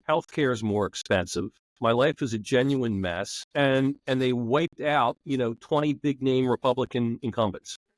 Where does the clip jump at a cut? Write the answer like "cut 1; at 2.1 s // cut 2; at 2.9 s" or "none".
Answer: cut 1; at 1.6 s // cut 2; at 3.4 s // cut 3; at 4.0 s